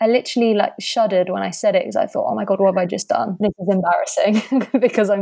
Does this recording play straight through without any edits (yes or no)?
yes